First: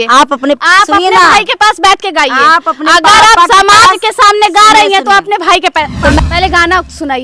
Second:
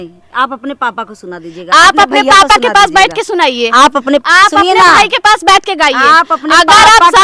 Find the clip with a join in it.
first; 1 cut; at 6.2 s

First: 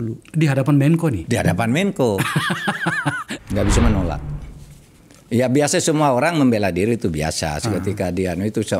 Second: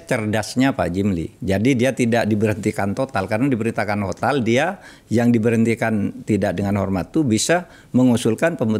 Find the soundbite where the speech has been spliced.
first; 1 cut; at 3.2 s

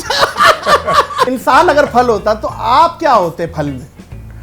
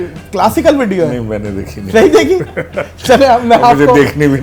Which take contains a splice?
first; 1 cut; at 1.3 s

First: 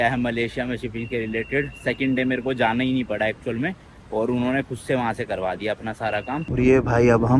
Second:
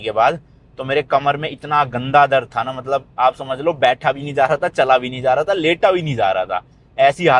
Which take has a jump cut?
first; 1 cut; at 6.5 s

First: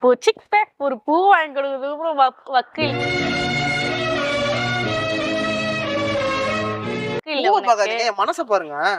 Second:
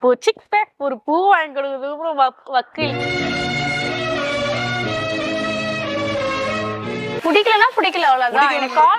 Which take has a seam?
second; 1 cut; at 7.3 s

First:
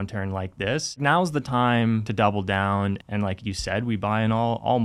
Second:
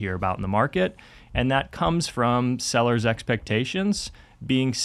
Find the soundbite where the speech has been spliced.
first; 3 cuts; at 1.0 s, 2.1 s, 3.0 s

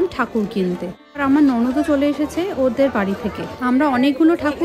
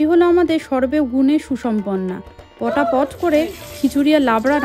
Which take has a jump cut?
first; 2 cuts; at 1.2 s, 3.5 s

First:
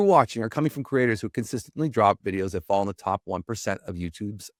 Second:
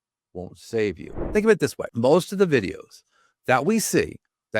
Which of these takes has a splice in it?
second; 2 cuts; at 1.1 s, 1.8 s

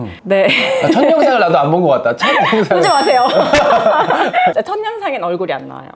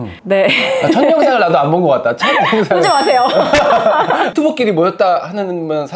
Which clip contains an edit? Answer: second; 1 cut; at 4.3 s

